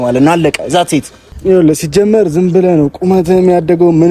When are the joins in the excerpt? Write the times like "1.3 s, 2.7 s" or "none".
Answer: 1.3 s